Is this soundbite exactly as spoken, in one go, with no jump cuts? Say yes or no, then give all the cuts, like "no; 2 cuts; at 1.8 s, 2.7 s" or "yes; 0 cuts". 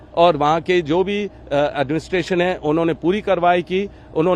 yes; 0 cuts